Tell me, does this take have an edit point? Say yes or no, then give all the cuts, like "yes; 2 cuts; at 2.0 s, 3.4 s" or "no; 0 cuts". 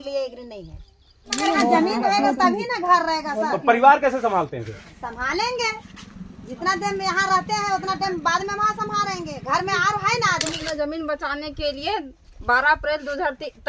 yes; 2 cuts; at 1.4 s, 10.6 s